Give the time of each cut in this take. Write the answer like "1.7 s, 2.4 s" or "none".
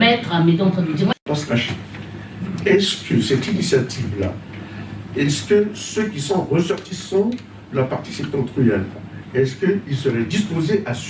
1.1 s